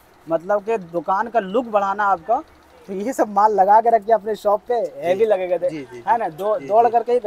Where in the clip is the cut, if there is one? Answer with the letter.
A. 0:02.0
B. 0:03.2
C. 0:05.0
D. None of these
D